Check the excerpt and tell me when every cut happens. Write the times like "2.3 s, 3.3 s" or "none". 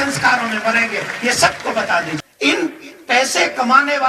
2.2 s